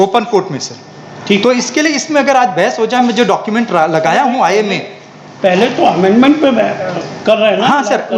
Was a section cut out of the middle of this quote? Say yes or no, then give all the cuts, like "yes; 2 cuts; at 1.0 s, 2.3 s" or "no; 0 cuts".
yes; 1 cut; at 1.2 s